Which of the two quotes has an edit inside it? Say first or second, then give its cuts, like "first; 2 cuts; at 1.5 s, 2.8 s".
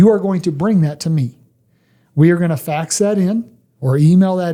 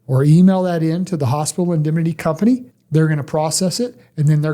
second; 1 cut; at 2.7 s